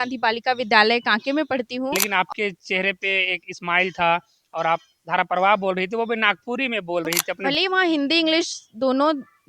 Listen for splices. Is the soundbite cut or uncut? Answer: cut